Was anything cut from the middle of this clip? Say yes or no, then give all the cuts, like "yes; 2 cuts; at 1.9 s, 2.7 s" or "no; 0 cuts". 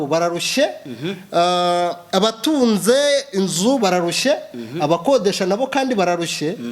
no; 0 cuts